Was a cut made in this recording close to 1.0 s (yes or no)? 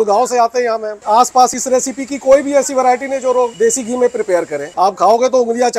yes